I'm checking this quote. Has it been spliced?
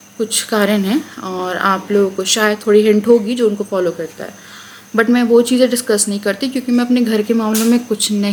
no; 0 cuts

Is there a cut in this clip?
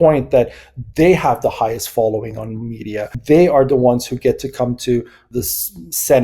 yes; 2 cuts; at 3.1 s, 5.3 s

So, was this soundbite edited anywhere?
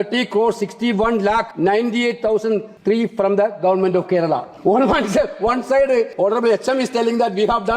yes; 4 cuts; at 1.5 s, 2.7 s, 4.5 s, 6.1 s

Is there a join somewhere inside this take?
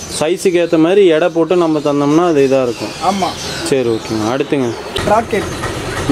yes; 1 cut; at 5.0 s

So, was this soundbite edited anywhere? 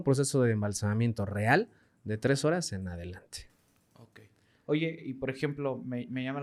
no; 0 cuts

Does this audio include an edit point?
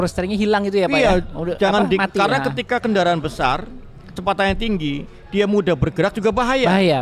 no; 0 cuts

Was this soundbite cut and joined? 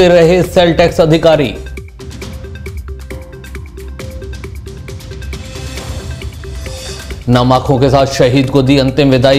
no; 0 cuts

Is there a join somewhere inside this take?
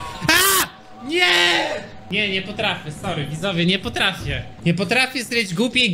yes; 2 cuts; at 2.0 s, 4.4 s

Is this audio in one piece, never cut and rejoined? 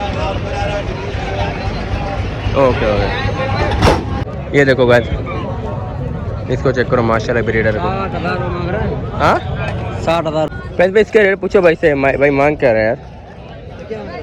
no; 2 cuts; at 4.3 s, 10.5 s

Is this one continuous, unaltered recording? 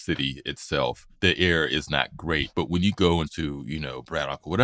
no; 3 cuts; at 1.1 s, 2.5 s, 3.3 s

